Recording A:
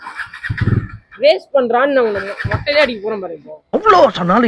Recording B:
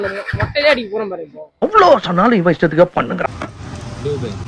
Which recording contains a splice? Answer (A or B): B